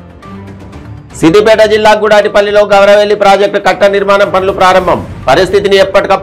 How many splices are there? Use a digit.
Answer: 1